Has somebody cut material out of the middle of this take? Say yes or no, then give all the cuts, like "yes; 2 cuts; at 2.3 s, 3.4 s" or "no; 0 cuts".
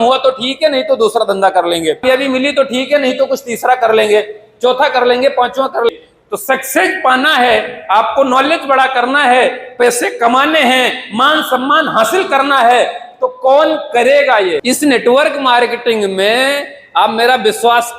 yes; 3 cuts; at 2.0 s, 5.9 s, 14.6 s